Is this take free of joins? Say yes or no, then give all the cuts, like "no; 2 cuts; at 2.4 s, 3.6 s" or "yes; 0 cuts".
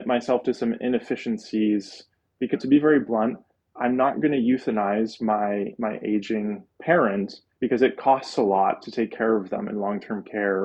no; 3 cuts; at 2.5 s, 6.7 s, 7.4 s